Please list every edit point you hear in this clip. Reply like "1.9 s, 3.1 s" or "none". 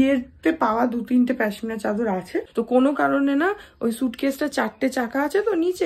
2.5 s